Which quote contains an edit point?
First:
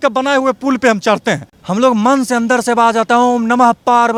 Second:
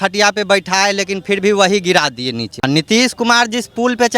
second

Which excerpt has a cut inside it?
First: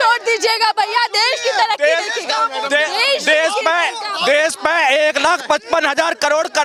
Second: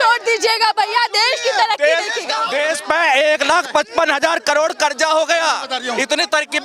second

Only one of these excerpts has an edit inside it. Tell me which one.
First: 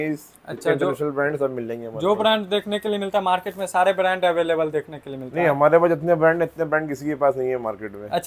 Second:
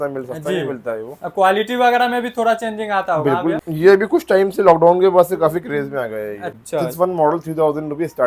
second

